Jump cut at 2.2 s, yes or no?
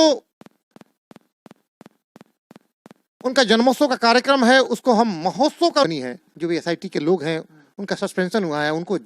no